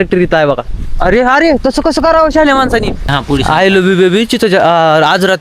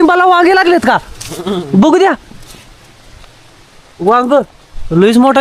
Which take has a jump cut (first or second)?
first